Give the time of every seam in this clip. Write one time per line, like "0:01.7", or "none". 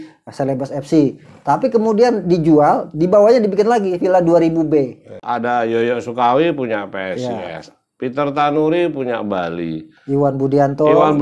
0:05.2